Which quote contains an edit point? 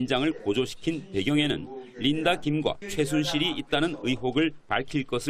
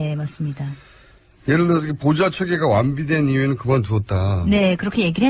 first; 1 cut; at 3.0 s

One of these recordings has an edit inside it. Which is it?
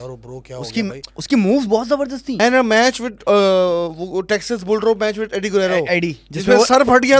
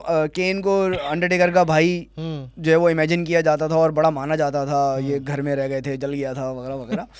first; 2 cuts; at 1.1 s, 2.4 s

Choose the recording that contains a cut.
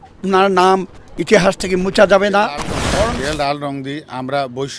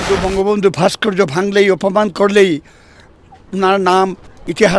first; 1 cut; at 2.8 s

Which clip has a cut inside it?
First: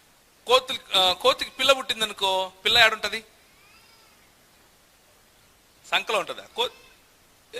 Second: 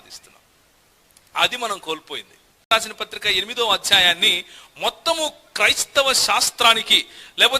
second; 1 cut; at 2.7 s

